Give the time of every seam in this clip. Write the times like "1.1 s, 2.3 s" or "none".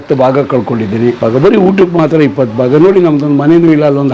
1.2 s